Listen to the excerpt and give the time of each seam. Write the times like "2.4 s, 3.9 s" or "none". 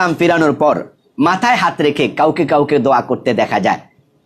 none